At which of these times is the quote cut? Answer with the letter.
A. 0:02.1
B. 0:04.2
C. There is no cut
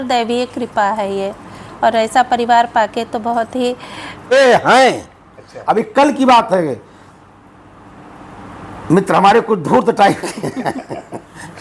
B